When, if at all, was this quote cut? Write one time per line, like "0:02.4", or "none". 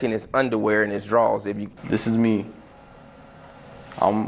0:01.7